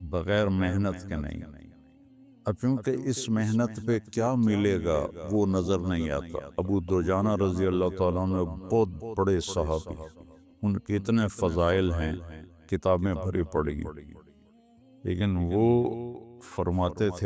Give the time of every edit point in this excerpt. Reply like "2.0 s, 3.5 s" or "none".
6.4 s